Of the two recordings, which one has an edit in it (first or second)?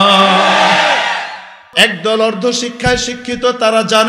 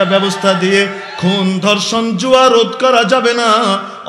first